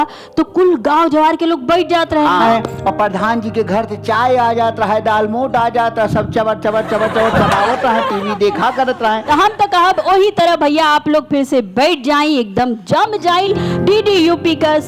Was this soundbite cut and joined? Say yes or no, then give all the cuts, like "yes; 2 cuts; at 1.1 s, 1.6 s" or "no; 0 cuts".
yes; 3 cuts; at 2.4 s, 9.2 s, 13.5 s